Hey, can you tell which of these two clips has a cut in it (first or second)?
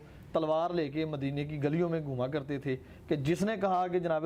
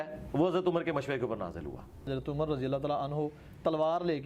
second